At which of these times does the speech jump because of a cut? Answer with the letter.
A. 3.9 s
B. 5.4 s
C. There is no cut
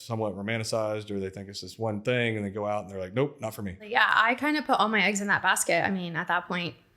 A